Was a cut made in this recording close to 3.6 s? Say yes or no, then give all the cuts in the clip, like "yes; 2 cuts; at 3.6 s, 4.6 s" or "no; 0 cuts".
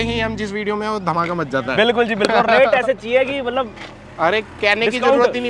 no; 0 cuts